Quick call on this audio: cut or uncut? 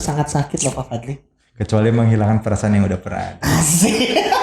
cut